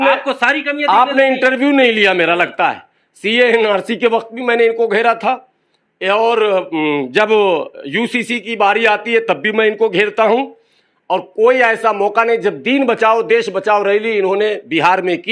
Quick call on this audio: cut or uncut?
uncut